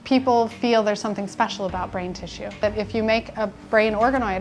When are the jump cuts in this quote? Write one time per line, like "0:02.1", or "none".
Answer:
0:02.6